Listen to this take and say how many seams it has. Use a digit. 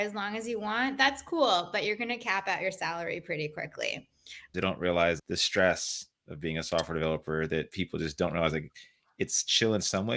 2